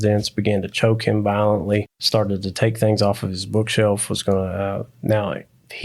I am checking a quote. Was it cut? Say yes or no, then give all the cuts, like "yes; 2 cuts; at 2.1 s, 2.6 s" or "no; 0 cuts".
yes; 1 cut; at 2.0 s